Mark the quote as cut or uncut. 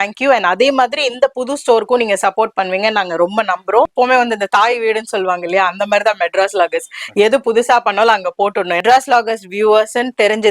cut